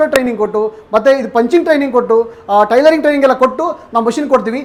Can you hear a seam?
no; 0 cuts

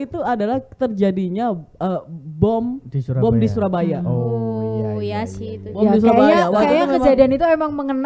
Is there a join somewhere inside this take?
no; 0 cuts

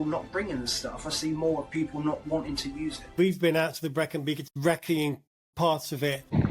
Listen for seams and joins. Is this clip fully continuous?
no; 2 cuts; at 3.1 s, 4.5 s

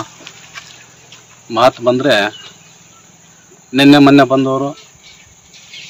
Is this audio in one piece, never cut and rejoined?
yes; 0 cuts

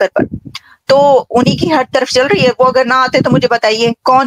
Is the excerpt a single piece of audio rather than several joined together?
yes; 0 cuts

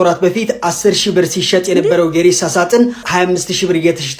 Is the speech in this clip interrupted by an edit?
yes; 1 cut; at 3.0 s

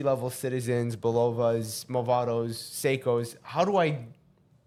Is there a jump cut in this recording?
no; 0 cuts

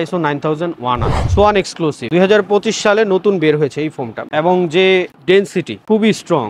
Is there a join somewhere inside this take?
yes; 2 cuts; at 1.3 s, 4.3 s

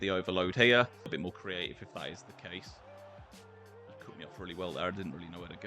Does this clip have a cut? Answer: yes; 1 cut; at 1.1 s

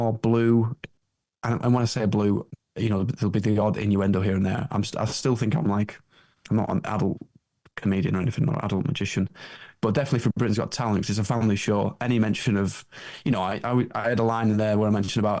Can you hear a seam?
yes; 1 cut; at 2.6 s

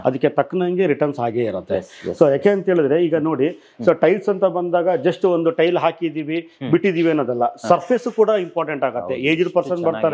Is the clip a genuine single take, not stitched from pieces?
yes; 0 cuts

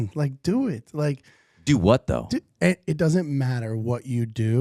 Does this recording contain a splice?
no; 0 cuts

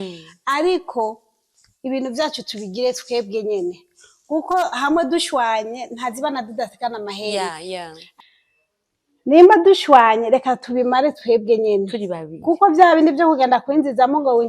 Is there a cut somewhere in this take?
yes; 1 cut; at 8.0 s

